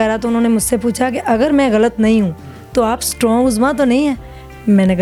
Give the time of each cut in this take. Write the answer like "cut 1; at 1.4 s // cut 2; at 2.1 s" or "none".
none